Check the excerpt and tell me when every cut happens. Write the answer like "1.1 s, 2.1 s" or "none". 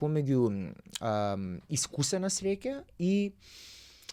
none

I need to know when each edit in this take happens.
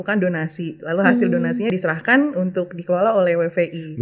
1.7 s

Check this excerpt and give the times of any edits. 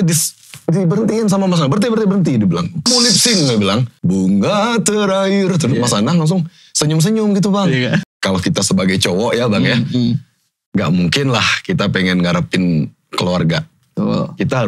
2.8 s, 3.9 s, 8.0 s

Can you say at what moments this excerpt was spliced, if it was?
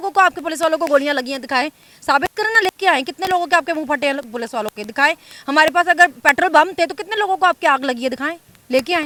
none

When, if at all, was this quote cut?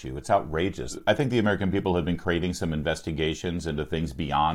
1.0 s

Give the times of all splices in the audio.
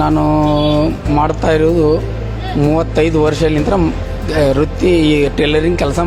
none

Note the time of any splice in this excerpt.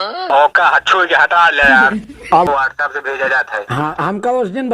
2.5 s

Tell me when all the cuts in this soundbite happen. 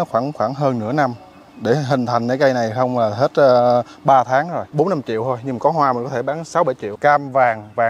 4.6 s, 6.9 s

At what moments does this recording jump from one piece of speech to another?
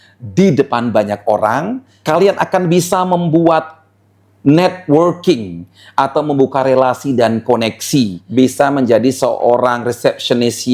1.9 s, 8.2 s

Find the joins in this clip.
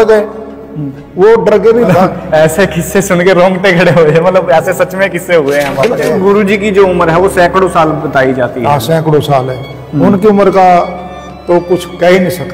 1.9 s, 5.9 s

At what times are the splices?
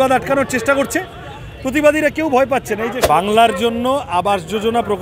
3.0 s

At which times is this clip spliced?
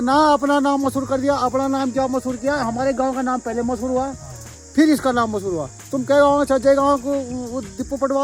none

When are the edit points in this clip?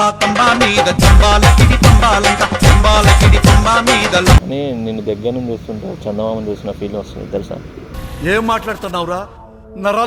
4.4 s

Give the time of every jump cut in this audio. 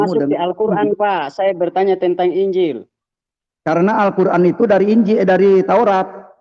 none

